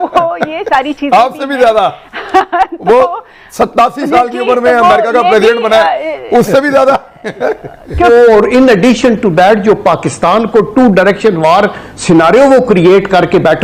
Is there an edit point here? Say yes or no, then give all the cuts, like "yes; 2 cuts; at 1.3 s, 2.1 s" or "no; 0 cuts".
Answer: yes; 1 cut; at 8.1 s